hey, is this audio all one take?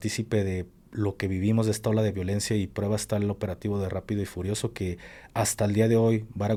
yes; 0 cuts

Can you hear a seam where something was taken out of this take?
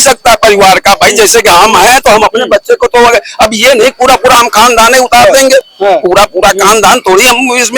no; 0 cuts

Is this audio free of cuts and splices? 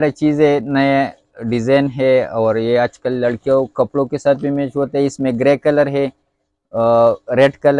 yes; 0 cuts

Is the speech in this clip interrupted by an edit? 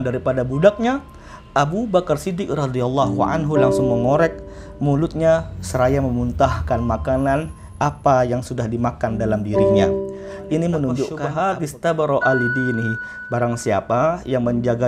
yes; 1 cut; at 11.2 s

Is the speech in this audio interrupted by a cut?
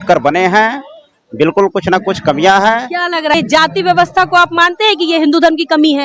yes; 1 cut; at 3.3 s

